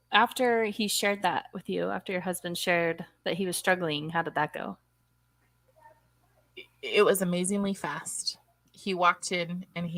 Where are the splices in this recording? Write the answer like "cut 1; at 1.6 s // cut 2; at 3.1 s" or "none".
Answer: none